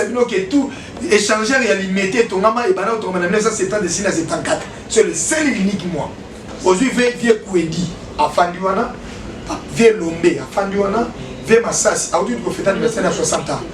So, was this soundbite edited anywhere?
yes; 1 cut; at 6.4 s

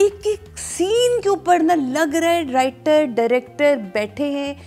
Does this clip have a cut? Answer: no; 0 cuts

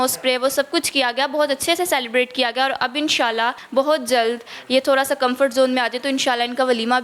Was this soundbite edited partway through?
yes; 1 cut; at 3.6 s

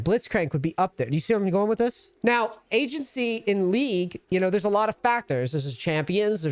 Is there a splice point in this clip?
yes; 2 cuts; at 2.1 s, 4.2 s

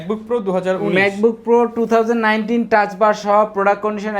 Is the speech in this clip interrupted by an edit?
no; 0 cuts

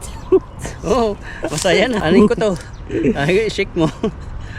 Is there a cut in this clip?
yes; 1 cut; at 2.0 s

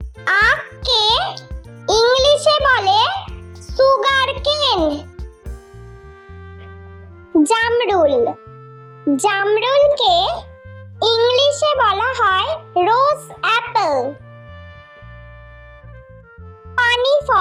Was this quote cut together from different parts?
no; 0 cuts

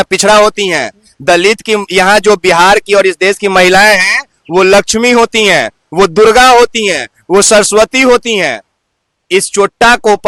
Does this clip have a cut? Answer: no; 0 cuts

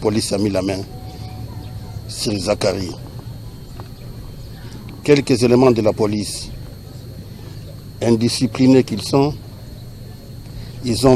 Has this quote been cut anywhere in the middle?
no; 0 cuts

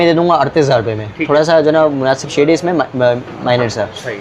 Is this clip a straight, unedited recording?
yes; 0 cuts

